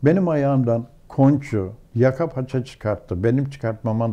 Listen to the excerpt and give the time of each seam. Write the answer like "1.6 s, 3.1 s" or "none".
1.8 s